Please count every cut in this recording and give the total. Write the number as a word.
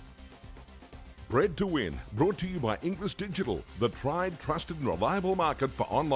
one